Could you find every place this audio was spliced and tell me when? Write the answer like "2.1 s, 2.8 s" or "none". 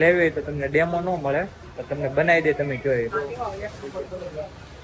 none